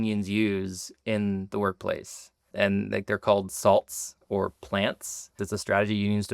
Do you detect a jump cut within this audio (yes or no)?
yes